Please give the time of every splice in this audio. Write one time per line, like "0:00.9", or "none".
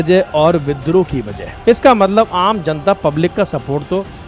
0:01.4